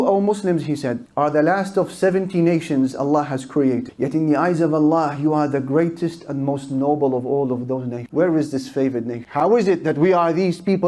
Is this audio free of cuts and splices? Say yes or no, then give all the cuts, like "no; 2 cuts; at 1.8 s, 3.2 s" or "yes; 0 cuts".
no; 1 cut; at 8.0 s